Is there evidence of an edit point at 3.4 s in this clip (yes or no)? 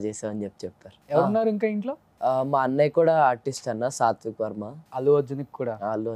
no